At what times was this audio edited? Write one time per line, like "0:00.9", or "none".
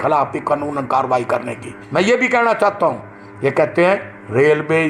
0:01.7